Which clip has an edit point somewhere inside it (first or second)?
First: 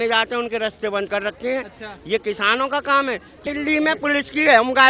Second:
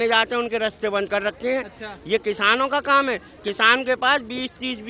first